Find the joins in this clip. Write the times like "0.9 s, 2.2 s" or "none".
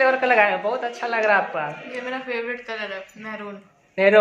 none